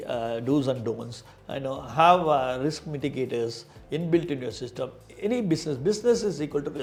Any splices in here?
no; 0 cuts

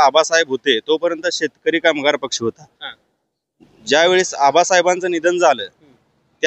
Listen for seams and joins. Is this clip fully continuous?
yes; 0 cuts

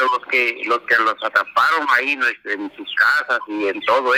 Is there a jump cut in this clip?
no; 0 cuts

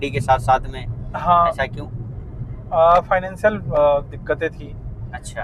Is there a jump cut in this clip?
no; 0 cuts

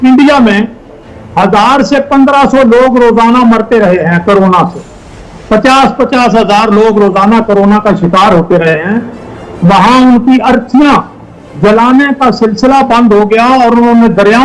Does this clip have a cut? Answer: no; 0 cuts

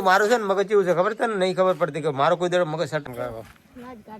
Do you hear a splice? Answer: yes; 1 cut; at 3.0 s

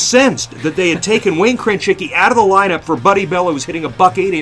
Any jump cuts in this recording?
no; 0 cuts

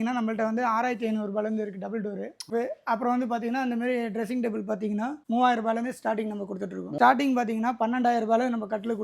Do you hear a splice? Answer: yes; 2 cuts; at 2.5 s, 6.9 s

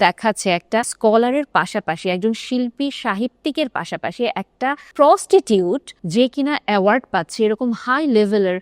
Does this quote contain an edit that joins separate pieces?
yes; 3 cuts; at 0.9 s, 4.8 s, 5.9 s

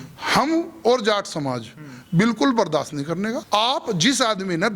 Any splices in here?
yes; 1 cut; at 3.4 s

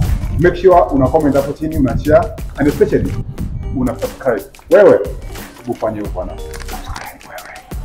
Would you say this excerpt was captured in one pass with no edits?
yes; 0 cuts

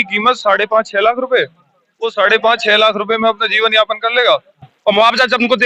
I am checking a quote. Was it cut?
yes; 1 cut; at 4.7 s

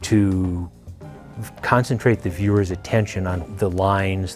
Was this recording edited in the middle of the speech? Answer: yes; 1 cut; at 3.4 s

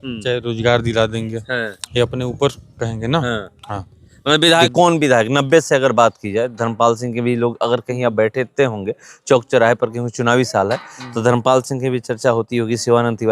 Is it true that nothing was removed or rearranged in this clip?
no; 1 cut; at 4.7 s

